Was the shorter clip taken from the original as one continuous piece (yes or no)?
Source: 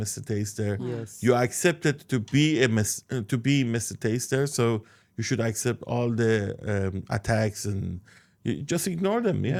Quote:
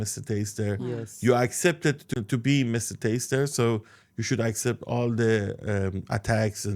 no